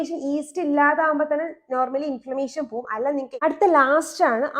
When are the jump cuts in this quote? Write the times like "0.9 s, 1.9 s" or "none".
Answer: 3.3 s